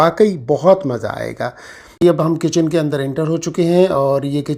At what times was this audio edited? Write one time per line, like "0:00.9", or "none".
0:02.0